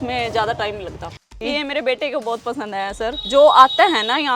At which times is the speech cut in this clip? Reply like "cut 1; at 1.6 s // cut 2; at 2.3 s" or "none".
cut 1; at 1.3 s // cut 2; at 3.2 s